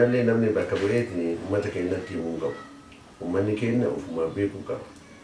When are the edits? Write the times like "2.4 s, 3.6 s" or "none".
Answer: none